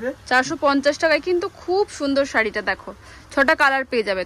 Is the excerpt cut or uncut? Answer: uncut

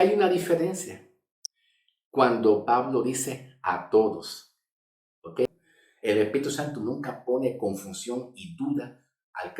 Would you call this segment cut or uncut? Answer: cut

